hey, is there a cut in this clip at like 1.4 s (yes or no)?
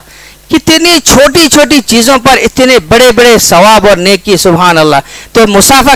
no